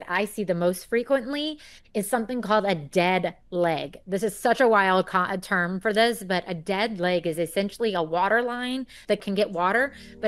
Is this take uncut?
yes; 0 cuts

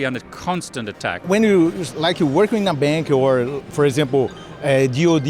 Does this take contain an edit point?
yes; 1 cut; at 1.2 s

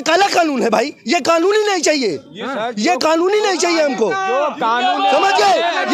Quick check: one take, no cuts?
yes; 0 cuts

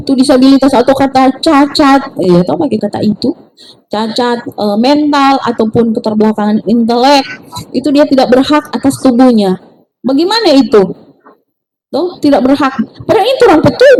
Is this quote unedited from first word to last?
yes; 0 cuts

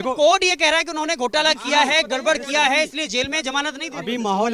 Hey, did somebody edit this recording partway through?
no; 0 cuts

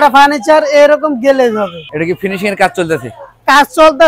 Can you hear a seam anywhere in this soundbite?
yes; 1 cut; at 1.9 s

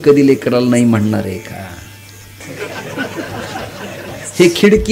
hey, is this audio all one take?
no; 1 cut; at 2.4 s

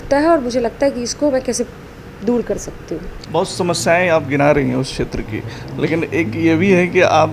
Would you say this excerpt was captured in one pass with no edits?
no; 1 cut; at 3.1 s

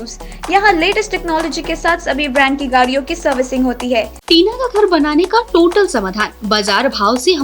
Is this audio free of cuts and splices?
no; 1 cut; at 4.2 s

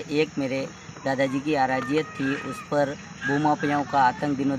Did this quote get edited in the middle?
no; 0 cuts

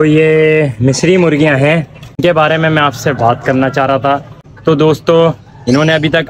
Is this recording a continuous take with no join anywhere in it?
no; 2 cuts; at 2.2 s, 4.4 s

